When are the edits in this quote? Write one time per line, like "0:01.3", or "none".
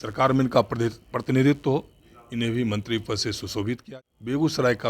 0:03.8